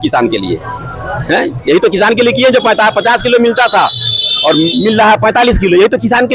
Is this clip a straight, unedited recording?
yes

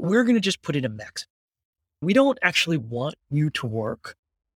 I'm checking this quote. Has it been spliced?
no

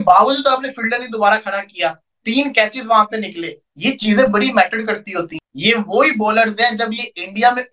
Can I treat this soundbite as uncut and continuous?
no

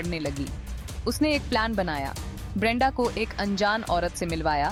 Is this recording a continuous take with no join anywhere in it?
yes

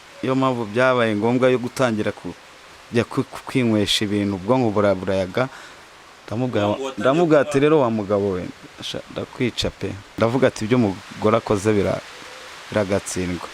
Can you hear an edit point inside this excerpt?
yes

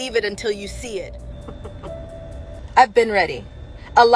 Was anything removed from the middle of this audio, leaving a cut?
no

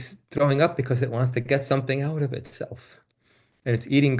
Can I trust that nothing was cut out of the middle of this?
yes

